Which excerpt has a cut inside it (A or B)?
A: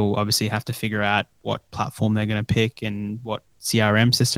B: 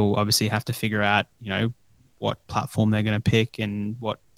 A